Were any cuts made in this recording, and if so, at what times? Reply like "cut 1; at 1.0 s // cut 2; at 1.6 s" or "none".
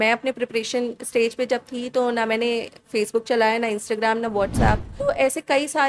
cut 1; at 4.9 s